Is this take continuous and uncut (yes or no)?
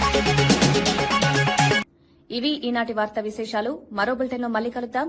yes